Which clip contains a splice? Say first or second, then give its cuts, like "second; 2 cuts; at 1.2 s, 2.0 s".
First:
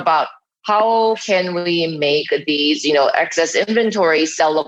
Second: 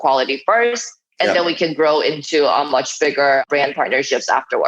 second; 1 cut; at 3.4 s